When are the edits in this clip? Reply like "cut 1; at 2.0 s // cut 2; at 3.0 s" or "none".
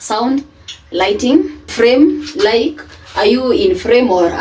cut 1; at 1.6 s